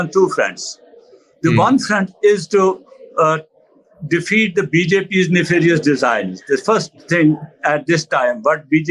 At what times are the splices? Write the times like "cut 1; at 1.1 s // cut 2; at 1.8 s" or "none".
none